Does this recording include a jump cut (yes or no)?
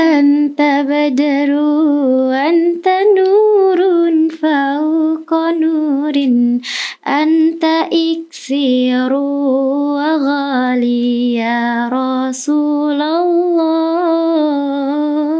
no